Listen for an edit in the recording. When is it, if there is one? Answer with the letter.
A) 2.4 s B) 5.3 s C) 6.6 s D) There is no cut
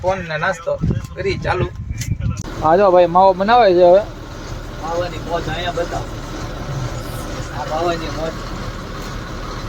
A